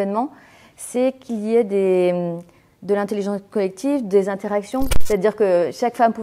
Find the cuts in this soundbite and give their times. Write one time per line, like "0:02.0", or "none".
0:04.9